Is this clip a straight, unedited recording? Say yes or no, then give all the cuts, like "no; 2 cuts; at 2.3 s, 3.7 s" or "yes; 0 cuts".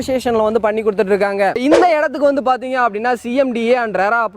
no; 1 cut; at 1.6 s